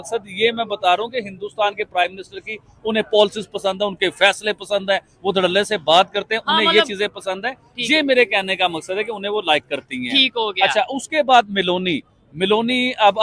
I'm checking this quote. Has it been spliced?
no; 0 cuts

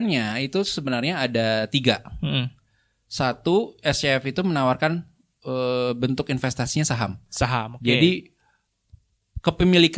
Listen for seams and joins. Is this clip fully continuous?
yes; 0 cuts

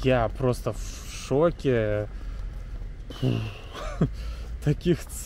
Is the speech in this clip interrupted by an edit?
no; 0 cuts

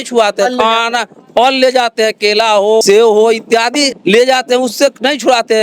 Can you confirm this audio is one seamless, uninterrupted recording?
no; 2 cuts; at 2.8 s, 4.0 s

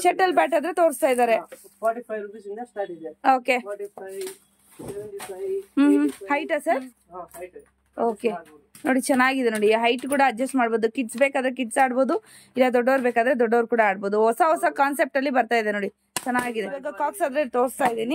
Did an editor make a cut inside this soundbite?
yes; 2 cuts; at 6.4 s, 16.9 s

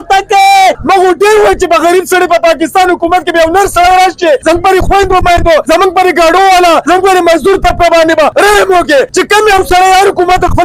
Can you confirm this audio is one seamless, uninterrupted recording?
no; 6 cuts; at 0.8 s, 4.4 s, 5.6 s, 6.8 s, 8.3 s, 9.1 s

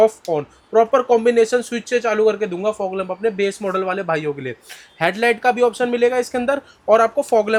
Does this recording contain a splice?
no; 0 cuts

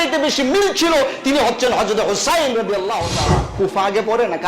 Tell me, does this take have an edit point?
yes; 1 cut; at 3.5 s

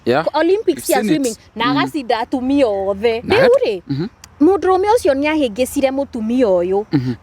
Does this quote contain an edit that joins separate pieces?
yes; 1 cut; at 3.2 s

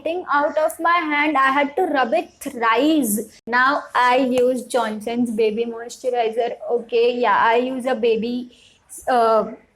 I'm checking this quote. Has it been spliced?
yes; 1 cut; at 3.4 s

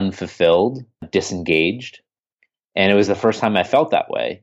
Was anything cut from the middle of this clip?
yes; 1 cut; at 1.1 s

